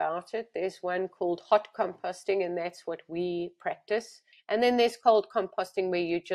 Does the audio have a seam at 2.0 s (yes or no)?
no